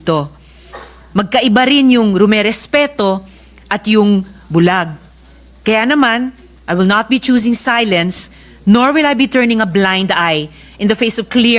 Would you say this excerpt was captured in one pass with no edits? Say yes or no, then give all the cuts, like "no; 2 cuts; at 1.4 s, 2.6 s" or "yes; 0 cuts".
yes; 0 cuts